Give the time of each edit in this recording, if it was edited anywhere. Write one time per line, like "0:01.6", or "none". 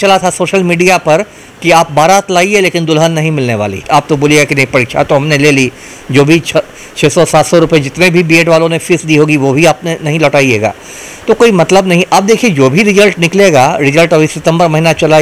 0:03.8